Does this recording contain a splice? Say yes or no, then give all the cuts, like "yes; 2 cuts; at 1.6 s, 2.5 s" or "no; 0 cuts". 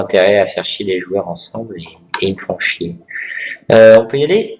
no; 0 cuts